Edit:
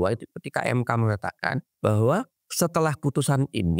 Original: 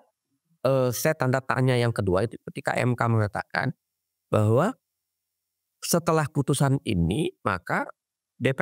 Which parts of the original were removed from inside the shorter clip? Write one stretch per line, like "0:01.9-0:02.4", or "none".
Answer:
0:03.8-0:04.2
0:04.9-0:05.7